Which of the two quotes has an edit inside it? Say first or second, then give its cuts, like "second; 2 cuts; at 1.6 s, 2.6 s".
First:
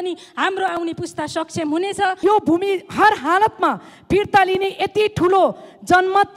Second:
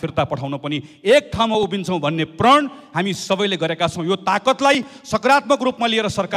first; 1 cut; at 2.2 s